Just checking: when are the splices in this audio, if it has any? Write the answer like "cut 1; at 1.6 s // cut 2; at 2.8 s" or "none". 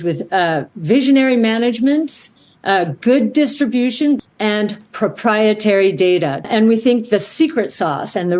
cut 1; at 4.2 s // cut 2; at 6.4 s